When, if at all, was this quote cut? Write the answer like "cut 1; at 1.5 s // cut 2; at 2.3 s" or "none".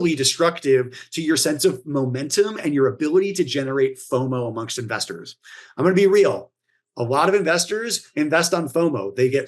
none